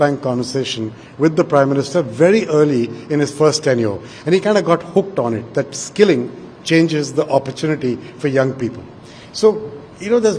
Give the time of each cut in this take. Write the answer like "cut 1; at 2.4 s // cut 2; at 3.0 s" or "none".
none